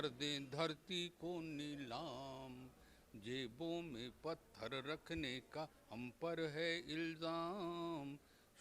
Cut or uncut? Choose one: uncut